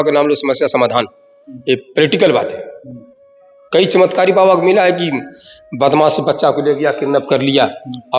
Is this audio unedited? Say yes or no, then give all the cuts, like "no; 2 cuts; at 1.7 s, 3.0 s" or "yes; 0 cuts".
yes; 0 cuts